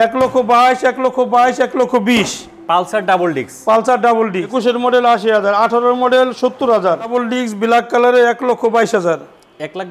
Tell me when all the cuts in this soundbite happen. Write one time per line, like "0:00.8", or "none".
0:04.5
0:07.1